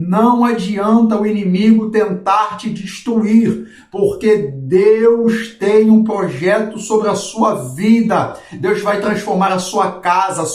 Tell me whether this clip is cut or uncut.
uncut